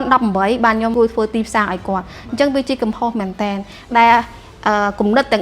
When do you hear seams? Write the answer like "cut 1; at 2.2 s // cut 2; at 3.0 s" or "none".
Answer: cut 1; at 0.9 s